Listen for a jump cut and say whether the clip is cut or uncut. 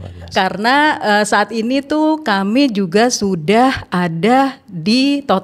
uncut